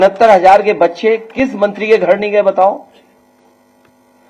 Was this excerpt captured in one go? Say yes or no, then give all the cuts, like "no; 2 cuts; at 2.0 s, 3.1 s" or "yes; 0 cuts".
yes; 0 cuts